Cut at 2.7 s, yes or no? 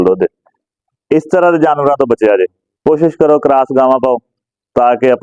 yes